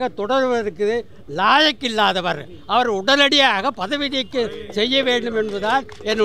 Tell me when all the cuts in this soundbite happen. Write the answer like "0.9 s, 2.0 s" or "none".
none